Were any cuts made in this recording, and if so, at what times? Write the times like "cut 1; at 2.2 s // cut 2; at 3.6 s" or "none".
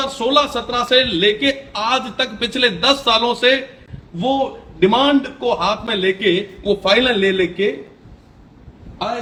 none